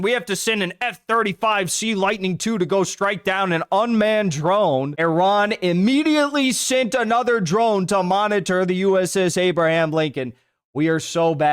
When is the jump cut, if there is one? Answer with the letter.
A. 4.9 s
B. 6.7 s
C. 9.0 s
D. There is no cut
A